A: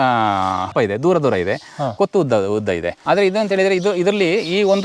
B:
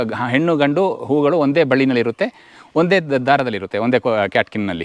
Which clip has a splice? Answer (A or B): A